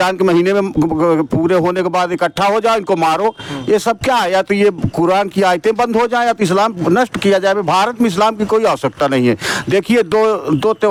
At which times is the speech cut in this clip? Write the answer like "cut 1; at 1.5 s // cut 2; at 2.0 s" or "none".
none